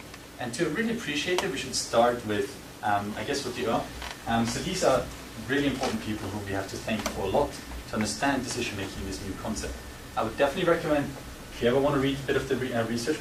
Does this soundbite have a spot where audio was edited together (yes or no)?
no